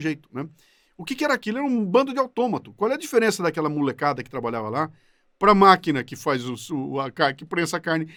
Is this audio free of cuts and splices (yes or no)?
yes